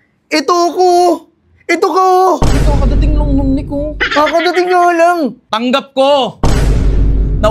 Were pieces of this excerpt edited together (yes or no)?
yes